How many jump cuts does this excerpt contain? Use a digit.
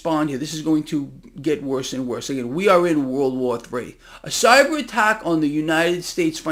0